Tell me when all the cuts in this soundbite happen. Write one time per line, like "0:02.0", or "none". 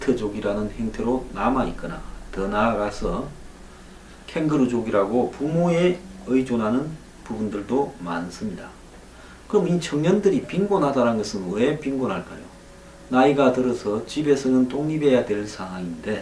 none